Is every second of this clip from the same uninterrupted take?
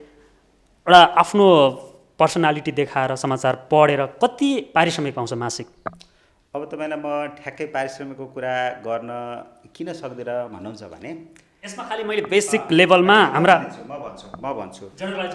yes; 0 cuts

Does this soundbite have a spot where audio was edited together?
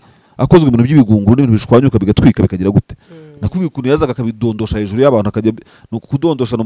no; 0 cuts

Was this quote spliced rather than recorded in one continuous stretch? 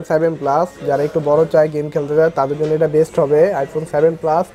no; 0 cuts

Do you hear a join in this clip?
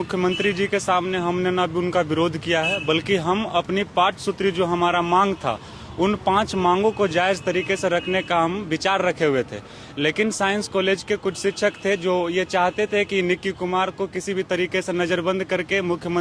no; 0 cuts

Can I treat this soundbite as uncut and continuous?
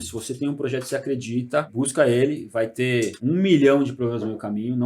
no; 2 cuts; at 1.7 s, 3.2 s

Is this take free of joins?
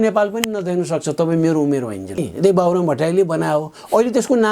no; 1 cut; at 2.2 s

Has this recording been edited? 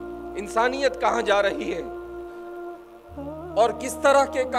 no; 0 cuts

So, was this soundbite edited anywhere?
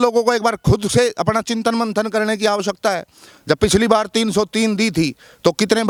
no; 0 cuts

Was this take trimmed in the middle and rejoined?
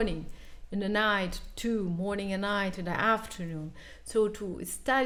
no; 0 cuts

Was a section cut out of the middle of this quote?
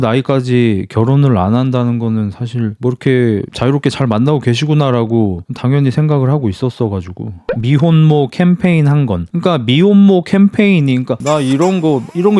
no; 0 cuts

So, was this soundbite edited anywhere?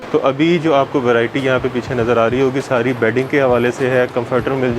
no; 0 cuts

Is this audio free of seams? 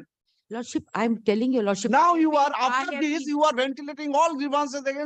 yes; 0 cuts

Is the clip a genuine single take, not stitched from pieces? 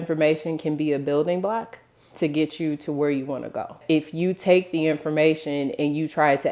no; 1 cut; at 3.8 s

